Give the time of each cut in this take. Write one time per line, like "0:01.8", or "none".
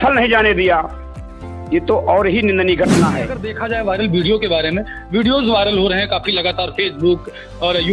0:03.5

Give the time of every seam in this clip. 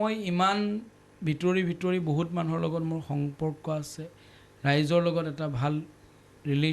none

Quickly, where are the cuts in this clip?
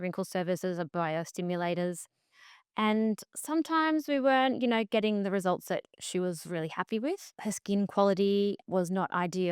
0:07.3
0:08.6

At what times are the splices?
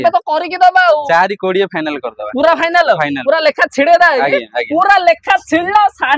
none

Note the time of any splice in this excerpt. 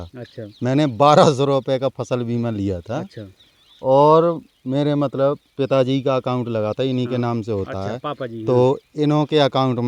none

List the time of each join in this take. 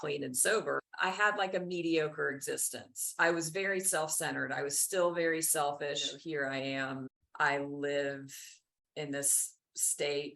0:00.9
0:06.1
0:07.2

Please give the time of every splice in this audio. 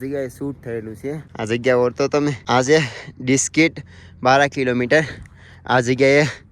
0:01.3
0:02.4

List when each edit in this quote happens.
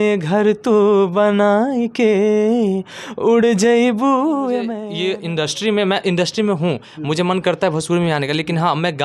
0:04.8

